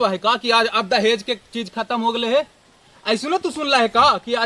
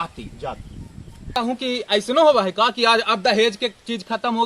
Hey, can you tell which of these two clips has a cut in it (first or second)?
second